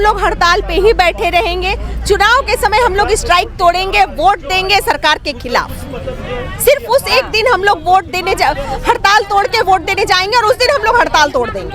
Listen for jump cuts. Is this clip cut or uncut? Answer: uncut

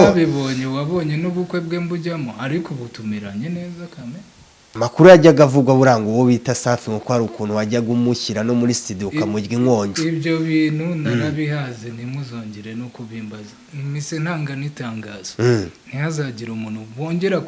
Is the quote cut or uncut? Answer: cut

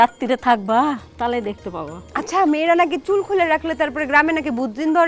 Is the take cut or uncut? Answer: cut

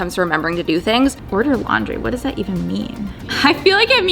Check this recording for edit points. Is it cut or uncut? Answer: cut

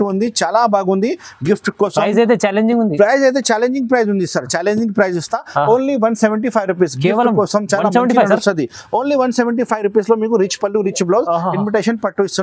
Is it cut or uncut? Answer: uncut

